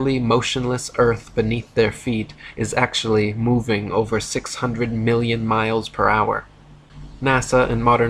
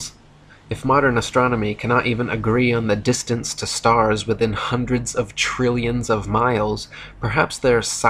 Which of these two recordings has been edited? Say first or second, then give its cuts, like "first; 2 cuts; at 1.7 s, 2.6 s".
first; 1 cut; at 2.1 s